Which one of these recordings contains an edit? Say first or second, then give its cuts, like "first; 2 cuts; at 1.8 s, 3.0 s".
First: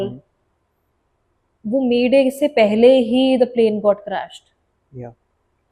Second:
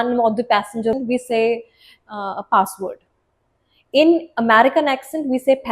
second; 1 cut; at 0.9 s